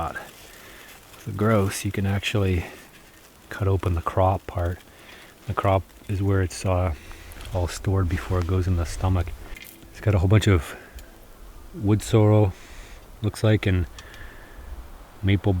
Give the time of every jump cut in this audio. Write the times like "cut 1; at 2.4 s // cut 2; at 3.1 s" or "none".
cut 1; at 9.4 s

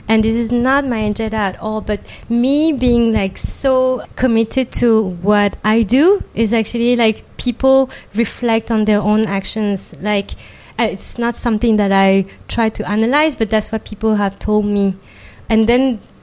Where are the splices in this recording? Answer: cut 1; at 4.1 s // cut 2; at 15.4 s

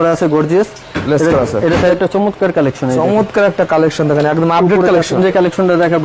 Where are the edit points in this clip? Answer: cut 1; at 1.9 s // cut 2; at 5.2 s

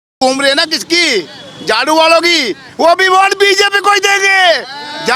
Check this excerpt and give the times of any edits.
none

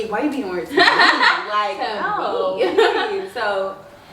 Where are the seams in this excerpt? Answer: none

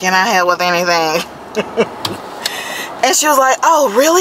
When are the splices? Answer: none

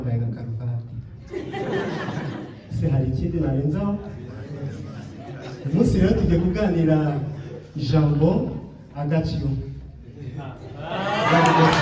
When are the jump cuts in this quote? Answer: cut 1; at 2.6 s

